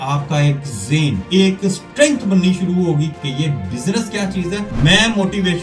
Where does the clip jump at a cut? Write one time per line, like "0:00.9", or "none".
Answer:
0:01.2
0:03.1
0:04.7